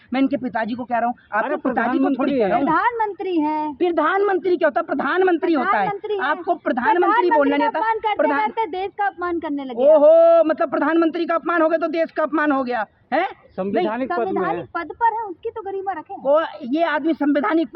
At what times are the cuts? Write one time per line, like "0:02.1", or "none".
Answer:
none